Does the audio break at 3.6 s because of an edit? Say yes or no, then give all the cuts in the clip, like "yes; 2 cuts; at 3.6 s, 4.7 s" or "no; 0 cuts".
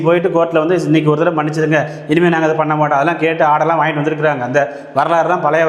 no; 0 cuts